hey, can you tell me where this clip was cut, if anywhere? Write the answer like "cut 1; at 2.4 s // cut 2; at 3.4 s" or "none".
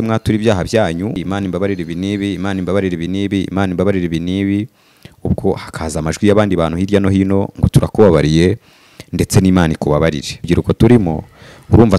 cut 1; at 1.2 s // cut 2; at 10.5 s